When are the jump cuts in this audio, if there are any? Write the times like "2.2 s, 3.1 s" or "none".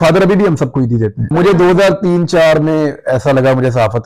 1.3 s